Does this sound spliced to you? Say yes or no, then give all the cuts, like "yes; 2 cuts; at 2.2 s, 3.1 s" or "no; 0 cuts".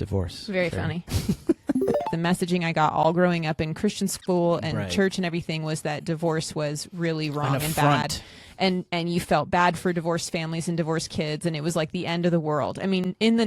yes; 1 cut; at 2.1 s